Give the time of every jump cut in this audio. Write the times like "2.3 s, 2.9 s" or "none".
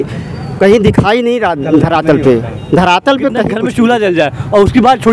3.5 s